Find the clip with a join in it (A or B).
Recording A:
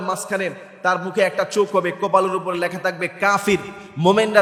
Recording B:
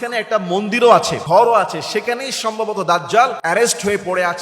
B